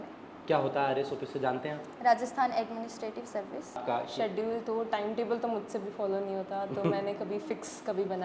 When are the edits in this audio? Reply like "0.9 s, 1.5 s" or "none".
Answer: 3.8 s